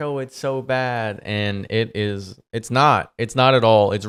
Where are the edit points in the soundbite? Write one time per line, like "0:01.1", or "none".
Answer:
none